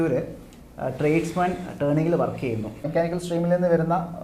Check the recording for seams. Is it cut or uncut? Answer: cut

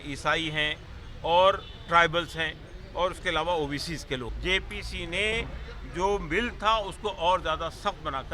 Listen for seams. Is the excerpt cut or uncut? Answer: cut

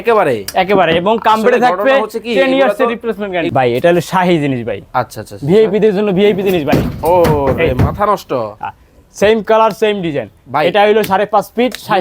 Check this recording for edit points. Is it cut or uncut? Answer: cut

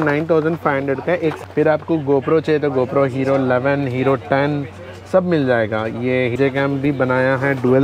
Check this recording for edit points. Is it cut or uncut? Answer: cut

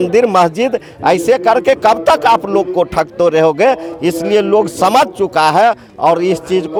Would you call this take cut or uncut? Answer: uncut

